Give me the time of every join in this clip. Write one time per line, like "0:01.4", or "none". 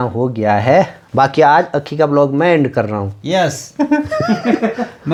none